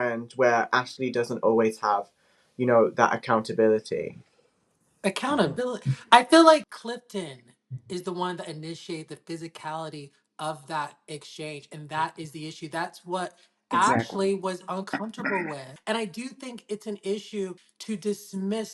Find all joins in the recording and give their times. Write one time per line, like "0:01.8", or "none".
0:06.8
0:15.7
0:17.7